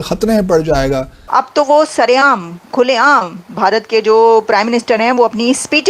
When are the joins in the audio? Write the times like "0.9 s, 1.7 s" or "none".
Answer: 1.1 s